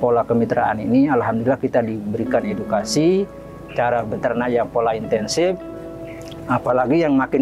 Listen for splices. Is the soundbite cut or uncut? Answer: uncut